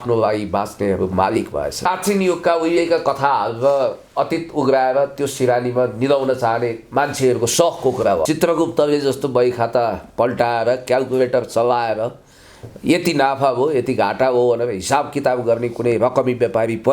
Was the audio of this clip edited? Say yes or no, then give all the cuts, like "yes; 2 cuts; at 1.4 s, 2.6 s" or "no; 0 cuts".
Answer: yes; 2 cuts; at 1.9 s, 8.2 s